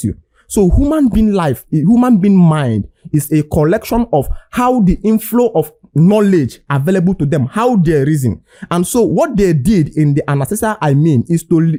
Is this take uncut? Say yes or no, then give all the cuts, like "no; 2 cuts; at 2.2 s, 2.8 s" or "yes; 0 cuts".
yes; 0 cuts